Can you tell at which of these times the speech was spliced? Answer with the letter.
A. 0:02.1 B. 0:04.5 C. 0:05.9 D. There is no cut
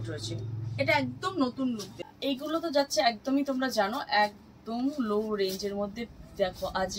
A